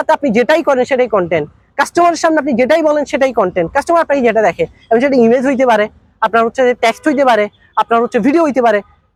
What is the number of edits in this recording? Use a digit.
0